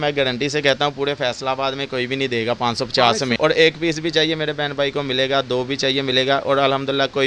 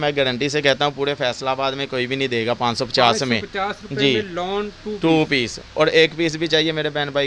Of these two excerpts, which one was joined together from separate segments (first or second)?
first